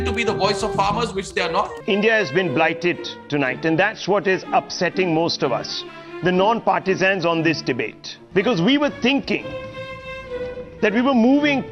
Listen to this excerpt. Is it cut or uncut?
cut